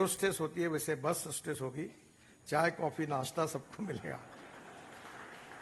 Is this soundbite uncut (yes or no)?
yes